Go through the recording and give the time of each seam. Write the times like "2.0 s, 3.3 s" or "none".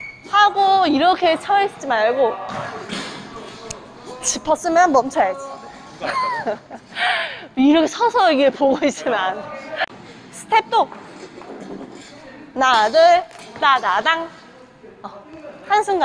9.9 s